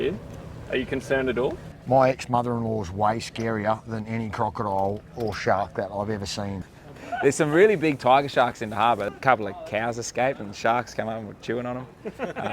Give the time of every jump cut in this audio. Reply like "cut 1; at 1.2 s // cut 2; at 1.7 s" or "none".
cut 1; at 6.6 s // cut 2; at 9.1 s

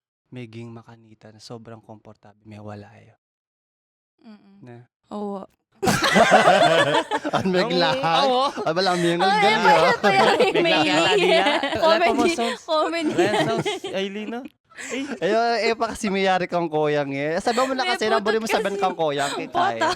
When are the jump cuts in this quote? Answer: cut 1; at 11.8 s

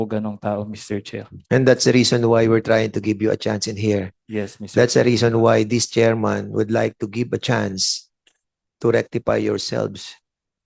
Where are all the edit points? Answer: none

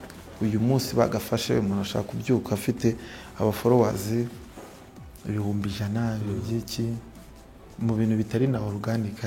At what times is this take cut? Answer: none

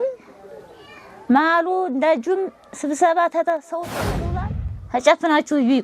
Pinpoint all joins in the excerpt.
cut 1; at 4.2 s

